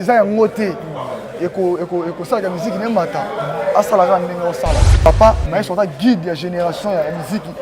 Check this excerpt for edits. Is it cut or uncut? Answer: cut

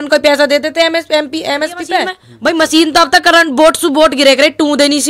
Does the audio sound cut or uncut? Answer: cut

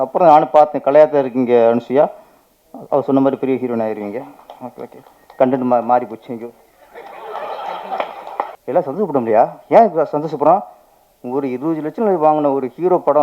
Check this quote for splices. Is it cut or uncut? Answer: cut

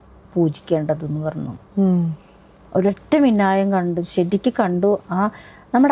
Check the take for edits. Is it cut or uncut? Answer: uncut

